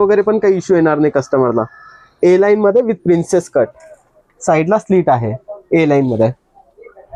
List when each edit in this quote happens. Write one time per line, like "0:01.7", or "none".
none